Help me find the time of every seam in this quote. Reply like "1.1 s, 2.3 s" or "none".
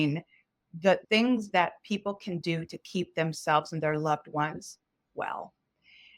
1.0 s